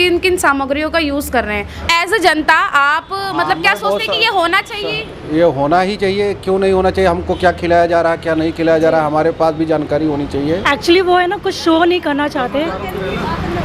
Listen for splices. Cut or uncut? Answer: cut